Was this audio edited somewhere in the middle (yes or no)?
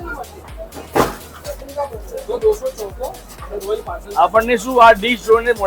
no